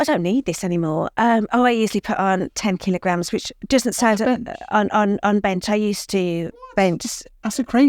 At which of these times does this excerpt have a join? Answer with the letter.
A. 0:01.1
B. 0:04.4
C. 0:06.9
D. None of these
A